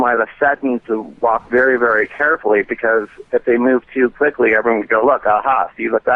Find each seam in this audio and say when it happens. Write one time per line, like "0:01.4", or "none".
none